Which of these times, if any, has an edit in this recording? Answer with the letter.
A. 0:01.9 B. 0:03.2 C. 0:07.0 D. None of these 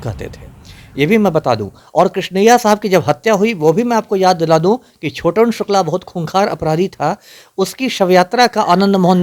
D